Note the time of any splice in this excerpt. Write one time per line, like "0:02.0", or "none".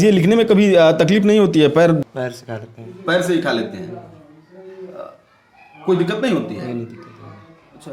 0:02.1